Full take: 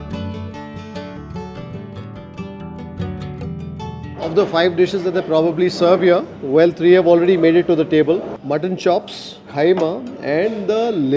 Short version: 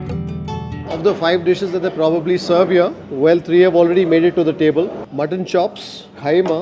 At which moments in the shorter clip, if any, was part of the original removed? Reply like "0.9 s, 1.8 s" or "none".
none